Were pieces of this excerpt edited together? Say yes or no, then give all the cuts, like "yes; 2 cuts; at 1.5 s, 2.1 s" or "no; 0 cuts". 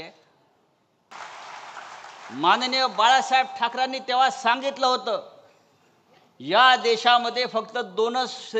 yes; 1 cut; at 1.1 s